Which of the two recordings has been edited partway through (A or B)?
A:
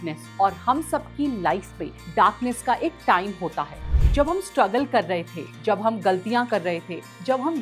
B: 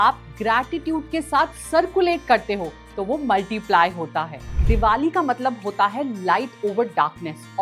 B